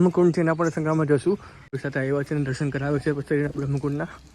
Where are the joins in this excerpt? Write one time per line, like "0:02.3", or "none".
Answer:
0:01.8